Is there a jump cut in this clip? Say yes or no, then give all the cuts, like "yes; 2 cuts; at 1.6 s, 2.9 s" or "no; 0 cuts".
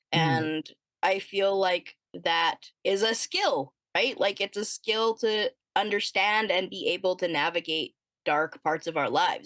yes; 1 cut; at 2.7 s